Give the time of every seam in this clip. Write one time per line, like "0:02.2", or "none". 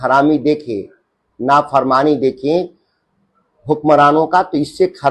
none